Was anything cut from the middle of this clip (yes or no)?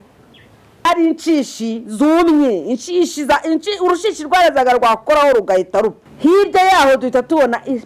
yes